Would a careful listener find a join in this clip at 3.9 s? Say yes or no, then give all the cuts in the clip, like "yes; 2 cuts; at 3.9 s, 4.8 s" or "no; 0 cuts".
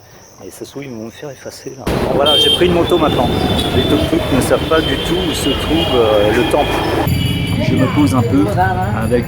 no; 2 cuts; at 1.9 s, 7.1 s